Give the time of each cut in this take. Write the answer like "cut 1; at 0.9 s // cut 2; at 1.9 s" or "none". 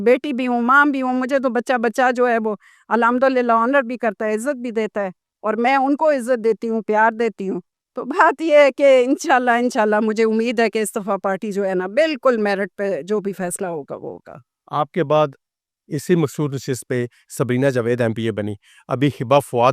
none